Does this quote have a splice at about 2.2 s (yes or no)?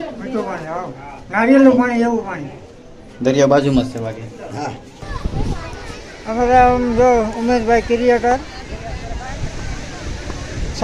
no